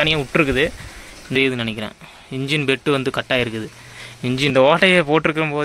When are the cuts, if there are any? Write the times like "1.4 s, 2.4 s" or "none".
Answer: 1.4 s, 4.5 s